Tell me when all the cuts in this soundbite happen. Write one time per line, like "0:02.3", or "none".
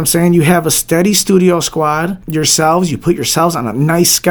0:02.2